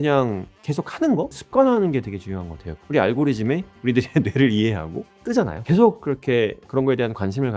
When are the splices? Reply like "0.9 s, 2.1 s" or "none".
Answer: 1.0 s, 2.8 s, 5.3 s